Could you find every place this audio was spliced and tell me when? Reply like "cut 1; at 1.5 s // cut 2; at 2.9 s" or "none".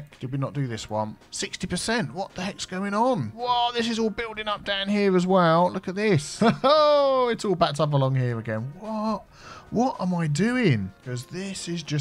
cut 1; at 1.2 s // cut 2; at 3.3 s // cut 3; at 6.3 s // cut 4; at 11.0 s